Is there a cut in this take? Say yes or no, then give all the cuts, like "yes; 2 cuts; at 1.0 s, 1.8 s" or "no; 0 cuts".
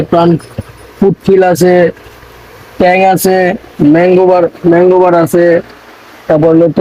no; 0 cuts